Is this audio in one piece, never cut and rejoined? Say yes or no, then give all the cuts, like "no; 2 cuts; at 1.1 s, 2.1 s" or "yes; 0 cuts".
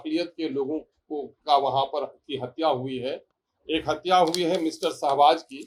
yes; 0 cuts